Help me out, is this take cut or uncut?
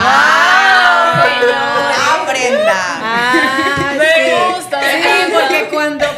uncut